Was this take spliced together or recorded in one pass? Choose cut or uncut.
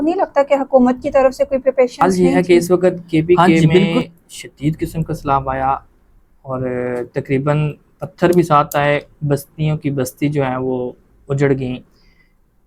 cut